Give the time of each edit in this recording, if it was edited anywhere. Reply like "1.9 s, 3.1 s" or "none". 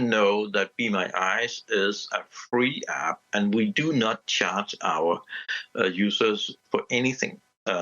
6.6 s